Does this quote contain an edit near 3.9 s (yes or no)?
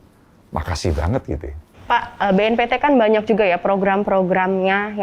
no